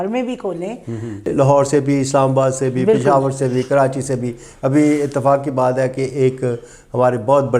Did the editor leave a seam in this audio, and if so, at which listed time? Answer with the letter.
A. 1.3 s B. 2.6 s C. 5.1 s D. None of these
A